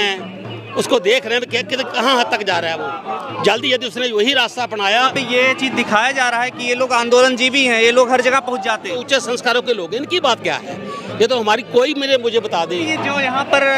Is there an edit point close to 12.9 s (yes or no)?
yes